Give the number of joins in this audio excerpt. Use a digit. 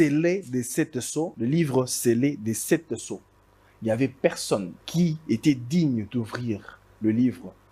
2